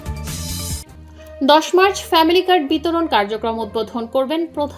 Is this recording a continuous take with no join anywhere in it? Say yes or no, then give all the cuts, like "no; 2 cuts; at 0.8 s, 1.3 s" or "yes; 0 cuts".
yes; 0 cuts